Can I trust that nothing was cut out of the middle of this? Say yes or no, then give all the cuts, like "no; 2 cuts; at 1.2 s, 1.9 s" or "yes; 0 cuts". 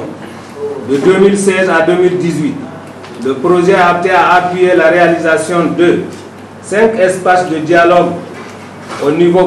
yes; 0 cuts